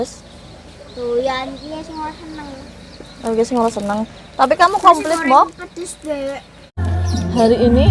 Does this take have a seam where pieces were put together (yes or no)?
yes